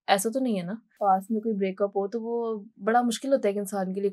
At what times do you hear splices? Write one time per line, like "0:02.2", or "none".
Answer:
0:00.9